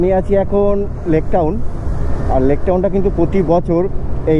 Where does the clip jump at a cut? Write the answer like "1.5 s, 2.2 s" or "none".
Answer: none

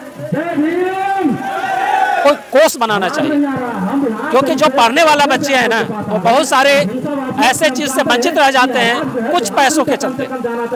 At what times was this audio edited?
none

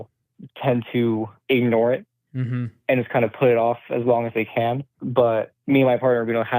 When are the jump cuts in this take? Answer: 4.9 s

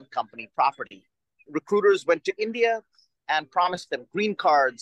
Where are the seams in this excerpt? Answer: 1.4 s, 3.8 s

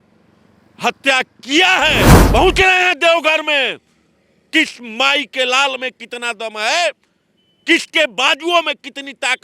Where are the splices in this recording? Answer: 2.2 s

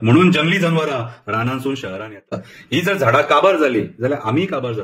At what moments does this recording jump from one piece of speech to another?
2.3 s

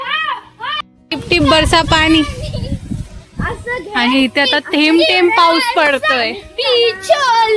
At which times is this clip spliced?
1.0 s

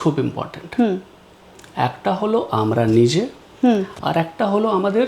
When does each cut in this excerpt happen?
none

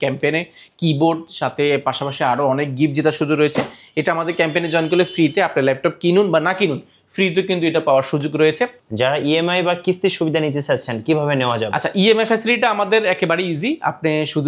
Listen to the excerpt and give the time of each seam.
8.8 s

